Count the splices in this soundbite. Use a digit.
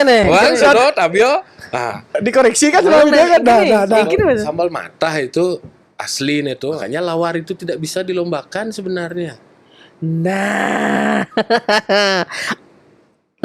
1